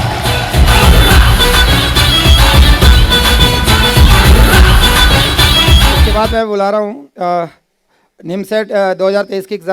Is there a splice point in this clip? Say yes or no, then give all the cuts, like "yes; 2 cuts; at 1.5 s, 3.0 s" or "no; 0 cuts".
yes; 1 cut; at 6.0 s